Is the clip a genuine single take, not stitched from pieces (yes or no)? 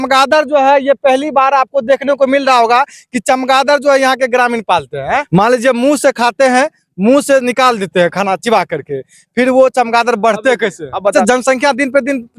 no